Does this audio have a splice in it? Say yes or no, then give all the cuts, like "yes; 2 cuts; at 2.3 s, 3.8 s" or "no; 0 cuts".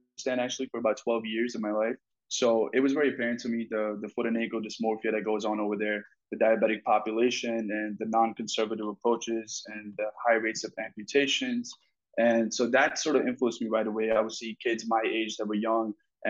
no; 0 cuts